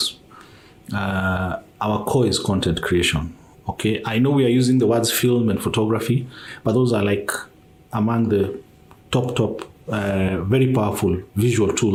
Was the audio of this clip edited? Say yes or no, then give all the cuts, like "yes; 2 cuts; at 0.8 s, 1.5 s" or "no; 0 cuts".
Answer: no; 0 cuts